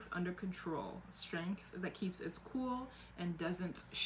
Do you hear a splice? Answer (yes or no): no